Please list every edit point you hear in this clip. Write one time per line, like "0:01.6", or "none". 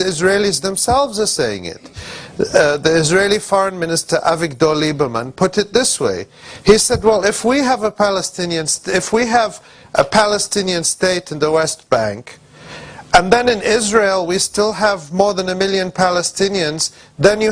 0:15.5